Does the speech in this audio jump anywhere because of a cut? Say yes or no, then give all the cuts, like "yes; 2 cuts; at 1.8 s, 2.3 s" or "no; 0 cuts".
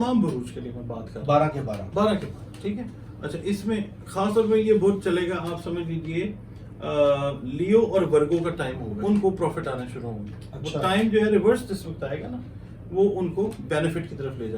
yes; 1 cut; at 8.9 s